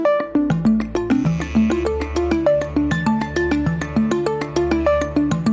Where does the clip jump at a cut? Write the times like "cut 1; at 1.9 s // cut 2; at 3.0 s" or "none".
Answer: cut 1; at 1.5 s